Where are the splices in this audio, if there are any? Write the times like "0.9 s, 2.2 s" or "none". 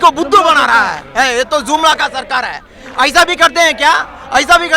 none

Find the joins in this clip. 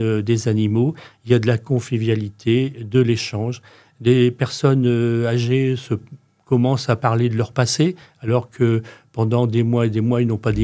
none

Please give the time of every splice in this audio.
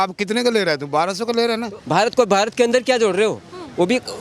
1.8 s

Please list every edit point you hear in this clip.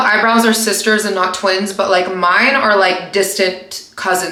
none

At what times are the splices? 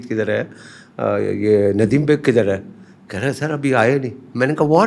none

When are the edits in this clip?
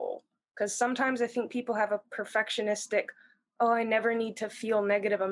none

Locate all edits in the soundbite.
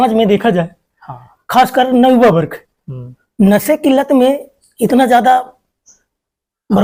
none

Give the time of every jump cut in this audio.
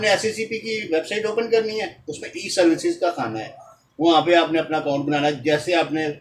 none

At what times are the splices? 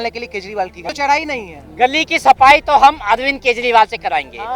none

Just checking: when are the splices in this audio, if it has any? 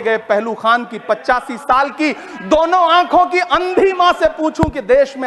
none

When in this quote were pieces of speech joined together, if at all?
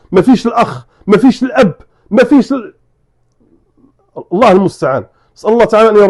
none

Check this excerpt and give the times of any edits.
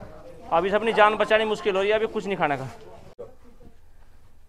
3.1 s

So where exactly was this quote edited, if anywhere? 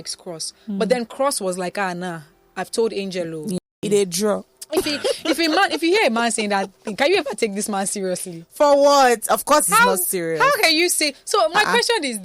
3.6 s

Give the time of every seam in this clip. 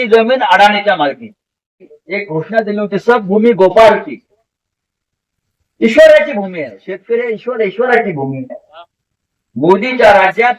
2.0 s

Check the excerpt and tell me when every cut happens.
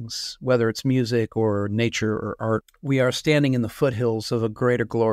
2.7 s

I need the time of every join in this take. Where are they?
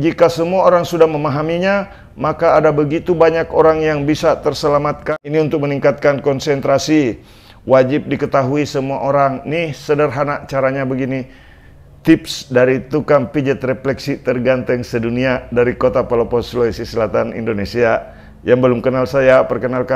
5.1 s

